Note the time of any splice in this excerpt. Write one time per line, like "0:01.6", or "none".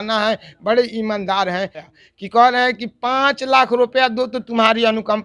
0:01.9

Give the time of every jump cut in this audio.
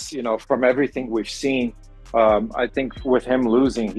none

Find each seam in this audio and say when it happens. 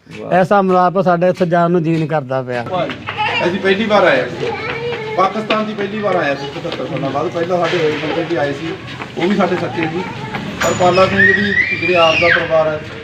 0:02.7

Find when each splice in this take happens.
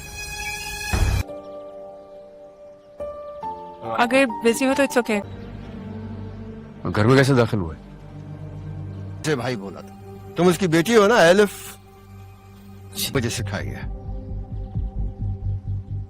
0:09.2

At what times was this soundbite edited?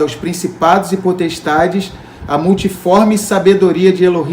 none

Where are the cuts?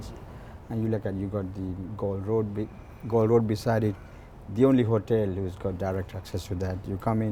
none

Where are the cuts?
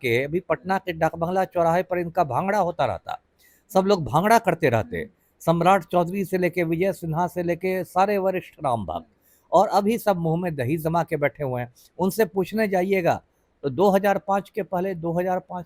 none

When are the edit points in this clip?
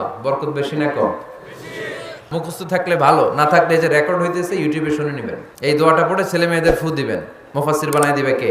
0:02.2
0:05.5

